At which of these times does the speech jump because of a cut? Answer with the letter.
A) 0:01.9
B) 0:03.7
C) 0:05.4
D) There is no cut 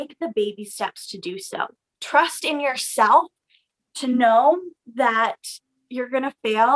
A